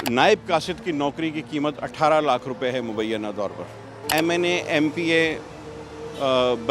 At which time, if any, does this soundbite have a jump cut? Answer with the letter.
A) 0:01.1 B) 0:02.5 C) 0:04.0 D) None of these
C